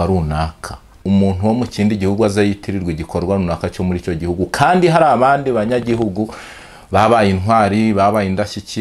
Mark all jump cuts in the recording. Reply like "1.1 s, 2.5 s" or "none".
0.9 s